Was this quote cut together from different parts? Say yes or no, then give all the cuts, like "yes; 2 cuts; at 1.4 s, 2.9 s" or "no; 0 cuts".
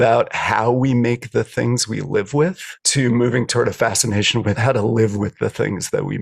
yes; 1 cut; at 4.6 s